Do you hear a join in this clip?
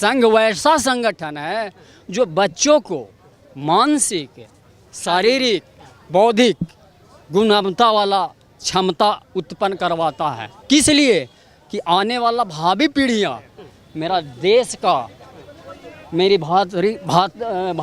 no; 0 cuts

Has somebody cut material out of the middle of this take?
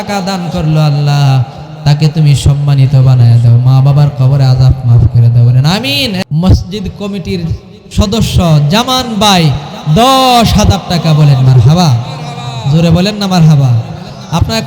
yes; 1 cut; at 6.2 s

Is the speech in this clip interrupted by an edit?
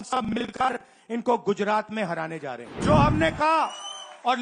yes; 1 cut; at 2.7 s

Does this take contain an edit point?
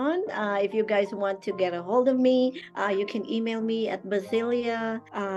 no; 0 cuts

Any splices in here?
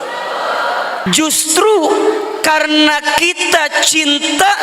yes; 1 cut; at 1.1 s

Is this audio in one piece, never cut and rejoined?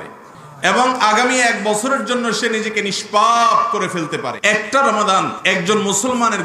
no; 2 cuts; at 4.3 s, 5.4 s

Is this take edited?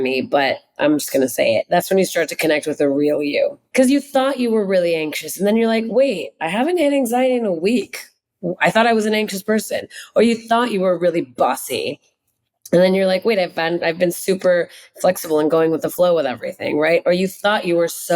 yes; 1 cut; at 3.6 s

